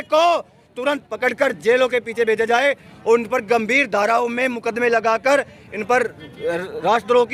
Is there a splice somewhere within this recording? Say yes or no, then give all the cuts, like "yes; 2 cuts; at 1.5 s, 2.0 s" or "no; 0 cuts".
no; 0 cuts